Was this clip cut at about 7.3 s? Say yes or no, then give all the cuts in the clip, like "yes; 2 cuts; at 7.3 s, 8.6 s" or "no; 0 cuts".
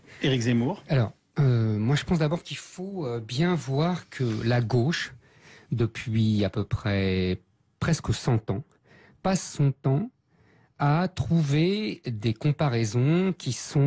yes; 1 cut; at 7.3 s